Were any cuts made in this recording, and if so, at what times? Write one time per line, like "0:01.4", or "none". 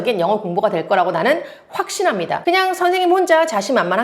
0:02.4